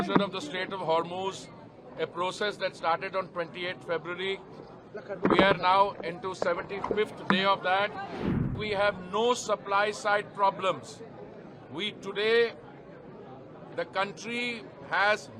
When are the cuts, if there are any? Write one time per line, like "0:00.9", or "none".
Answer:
0:08.4